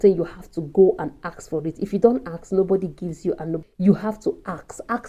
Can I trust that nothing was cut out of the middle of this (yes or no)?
no